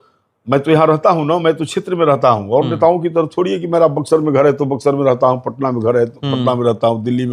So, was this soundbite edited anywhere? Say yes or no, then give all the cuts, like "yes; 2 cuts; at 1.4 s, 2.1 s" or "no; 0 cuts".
no; 0 cuts